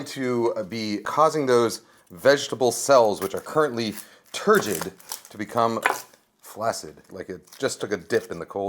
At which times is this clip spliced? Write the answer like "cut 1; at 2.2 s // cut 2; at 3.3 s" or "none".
cut 1; at 1.0 s // cut 2; at 7.2 s